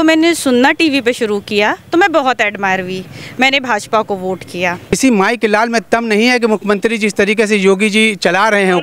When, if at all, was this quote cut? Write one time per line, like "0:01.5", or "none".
0:04.9